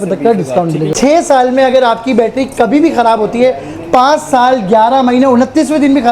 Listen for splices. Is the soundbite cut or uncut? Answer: cut